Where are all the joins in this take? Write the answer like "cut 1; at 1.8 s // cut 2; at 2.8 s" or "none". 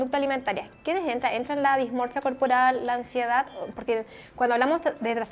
none